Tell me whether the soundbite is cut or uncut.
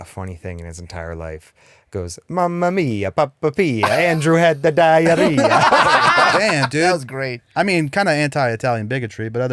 cut